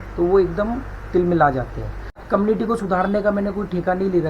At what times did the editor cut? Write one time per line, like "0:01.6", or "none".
0:02.2